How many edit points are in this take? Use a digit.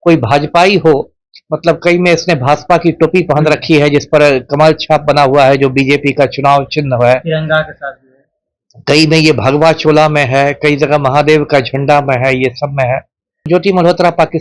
1